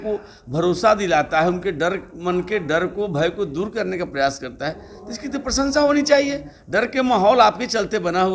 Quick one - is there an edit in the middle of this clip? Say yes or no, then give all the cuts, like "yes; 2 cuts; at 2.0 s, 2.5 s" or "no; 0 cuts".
no; 0 cuts